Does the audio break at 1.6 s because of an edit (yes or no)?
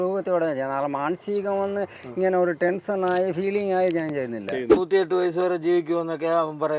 no